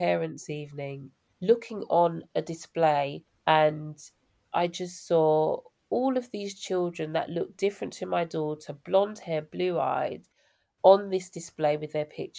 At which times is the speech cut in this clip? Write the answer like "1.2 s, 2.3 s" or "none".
1.0 s, 3.3 s